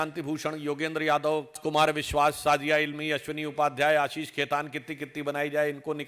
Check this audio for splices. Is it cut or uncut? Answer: cut